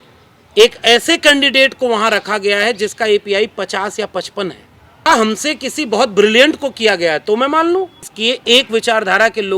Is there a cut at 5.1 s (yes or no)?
yes